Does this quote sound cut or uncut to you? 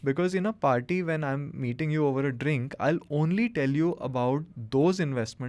uncut